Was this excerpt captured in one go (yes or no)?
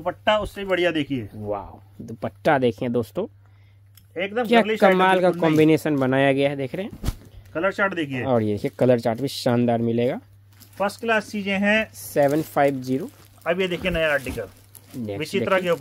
yes